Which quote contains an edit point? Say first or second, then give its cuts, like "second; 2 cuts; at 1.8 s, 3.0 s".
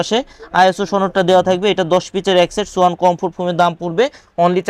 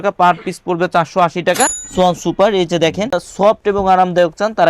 second; 2 cuts; at 1.8 s, 3.2 s